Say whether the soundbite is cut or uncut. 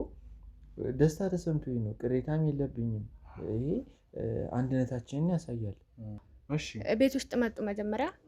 cut